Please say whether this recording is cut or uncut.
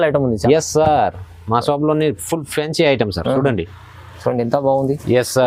uncut